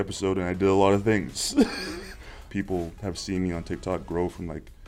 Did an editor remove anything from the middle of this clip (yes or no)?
yes